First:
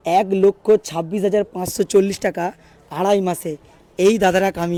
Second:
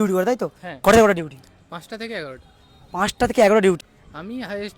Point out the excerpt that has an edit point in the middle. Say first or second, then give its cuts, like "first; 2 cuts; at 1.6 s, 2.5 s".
second; 1 cut; at 3.8 s